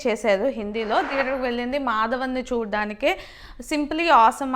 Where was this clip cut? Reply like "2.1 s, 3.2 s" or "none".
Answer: 1.1 s